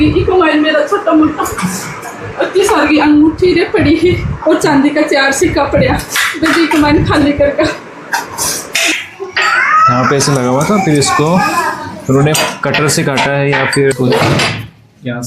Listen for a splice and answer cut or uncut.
cut